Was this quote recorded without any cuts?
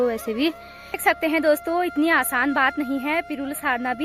no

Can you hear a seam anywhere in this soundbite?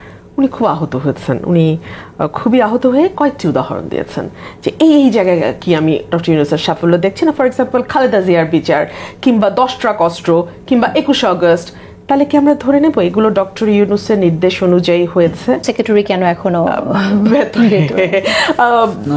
yes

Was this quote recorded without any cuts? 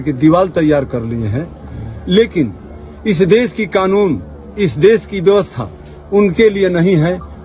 yes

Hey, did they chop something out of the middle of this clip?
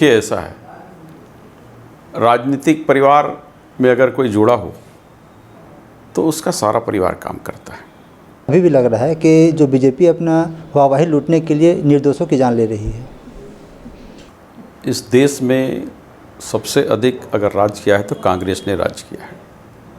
yes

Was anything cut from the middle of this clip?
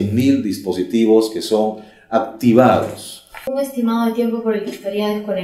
yes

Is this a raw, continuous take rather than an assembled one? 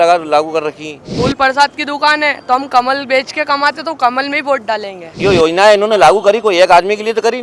no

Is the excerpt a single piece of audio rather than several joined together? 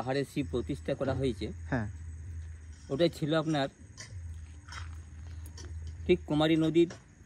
yes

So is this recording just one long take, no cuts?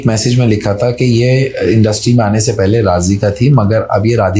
yes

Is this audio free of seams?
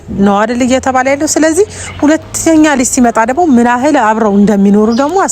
yes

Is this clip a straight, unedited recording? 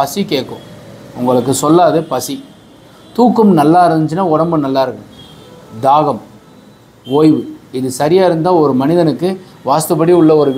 yes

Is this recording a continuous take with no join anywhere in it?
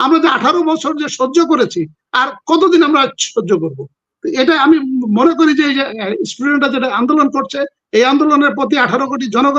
yes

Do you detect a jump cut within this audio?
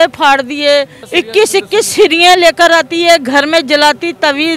yes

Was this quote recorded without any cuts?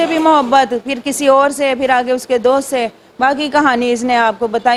yes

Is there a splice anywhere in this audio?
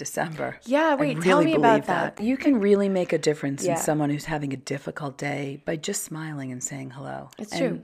yes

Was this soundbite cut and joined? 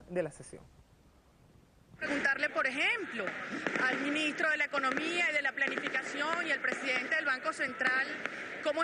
yes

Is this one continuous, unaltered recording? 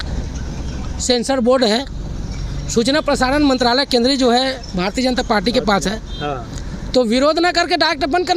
yes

